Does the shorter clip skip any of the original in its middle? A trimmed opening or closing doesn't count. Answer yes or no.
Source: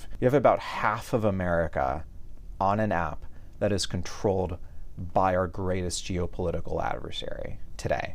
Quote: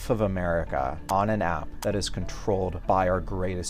yes